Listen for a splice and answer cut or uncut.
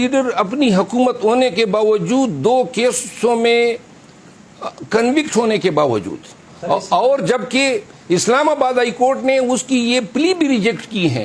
uncut